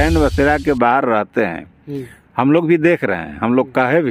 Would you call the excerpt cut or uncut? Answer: uncut